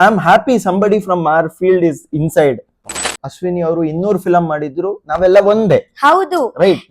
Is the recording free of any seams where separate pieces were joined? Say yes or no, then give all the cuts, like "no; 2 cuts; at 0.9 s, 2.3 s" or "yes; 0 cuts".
no; 1 cut; at 3.0 s